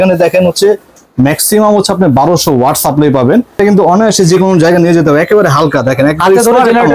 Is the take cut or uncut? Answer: cut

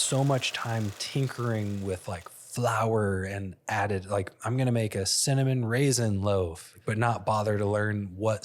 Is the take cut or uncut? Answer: cut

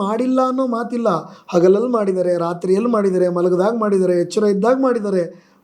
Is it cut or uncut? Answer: uncut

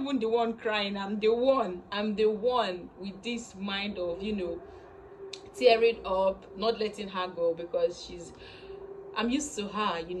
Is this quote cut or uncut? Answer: uncut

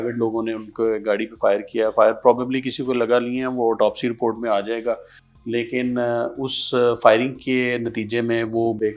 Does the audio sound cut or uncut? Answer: uncut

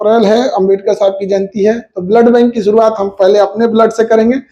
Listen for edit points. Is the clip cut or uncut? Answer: uncut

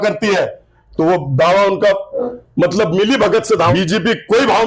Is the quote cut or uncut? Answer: cut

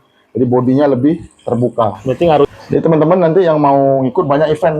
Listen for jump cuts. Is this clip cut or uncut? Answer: cut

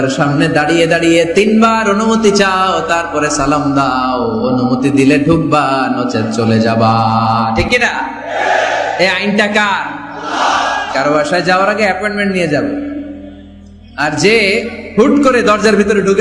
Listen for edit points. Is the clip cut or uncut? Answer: uncut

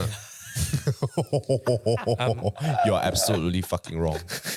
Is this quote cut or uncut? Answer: uncut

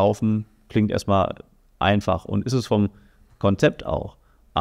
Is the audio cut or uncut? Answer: uncut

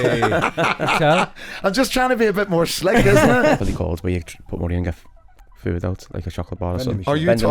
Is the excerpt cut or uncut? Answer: cut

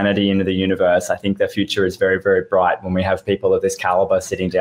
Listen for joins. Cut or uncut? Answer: uncut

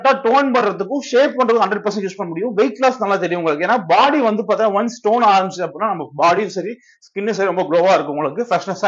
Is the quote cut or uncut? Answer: uncut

